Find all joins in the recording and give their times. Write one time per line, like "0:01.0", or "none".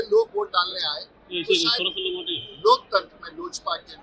none